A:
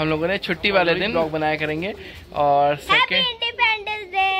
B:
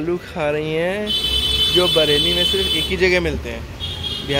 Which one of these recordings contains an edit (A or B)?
A